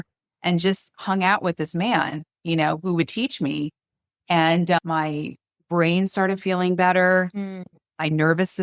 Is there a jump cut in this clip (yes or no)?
yes